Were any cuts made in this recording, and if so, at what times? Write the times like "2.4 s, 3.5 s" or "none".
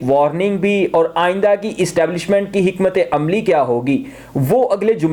none